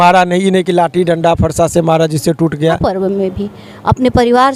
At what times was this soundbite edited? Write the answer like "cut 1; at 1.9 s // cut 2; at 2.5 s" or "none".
cut 1; at 2.8 s